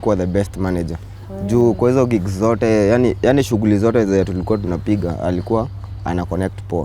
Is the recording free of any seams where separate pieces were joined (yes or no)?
yes